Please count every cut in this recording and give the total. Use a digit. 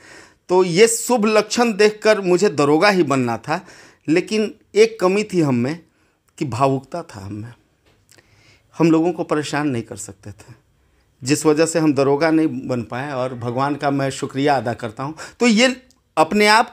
0